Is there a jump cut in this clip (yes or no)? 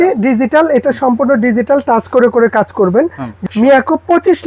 yes